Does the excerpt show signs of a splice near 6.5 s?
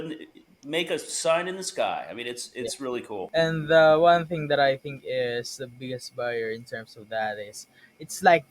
no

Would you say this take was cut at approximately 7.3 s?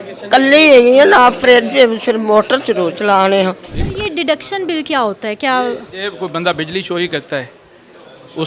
no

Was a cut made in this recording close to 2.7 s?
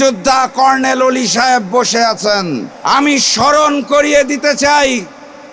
yes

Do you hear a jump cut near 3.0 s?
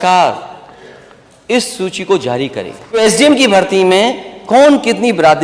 yes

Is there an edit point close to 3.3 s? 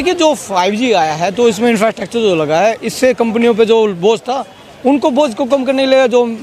no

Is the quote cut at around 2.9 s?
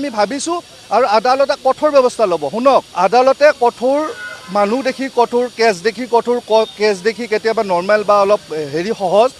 yes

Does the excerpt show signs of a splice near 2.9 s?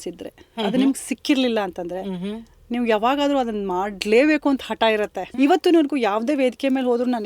no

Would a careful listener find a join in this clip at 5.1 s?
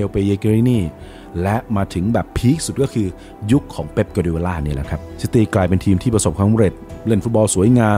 no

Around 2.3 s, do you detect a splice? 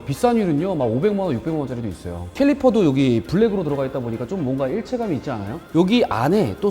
yes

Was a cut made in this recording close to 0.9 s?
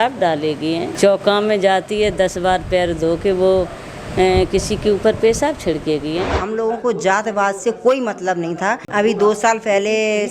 yes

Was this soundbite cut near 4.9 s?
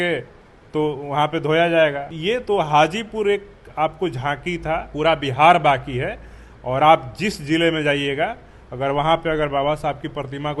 yes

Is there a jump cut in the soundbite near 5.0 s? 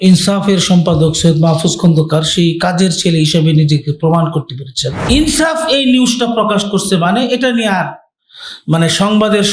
yes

